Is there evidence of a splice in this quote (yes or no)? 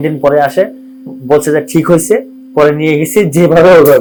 no